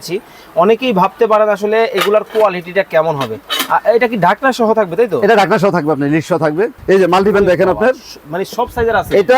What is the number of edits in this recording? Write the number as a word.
one